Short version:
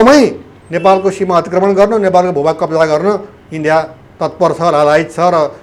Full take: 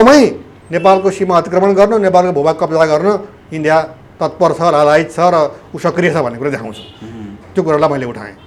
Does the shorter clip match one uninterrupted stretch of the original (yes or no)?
yes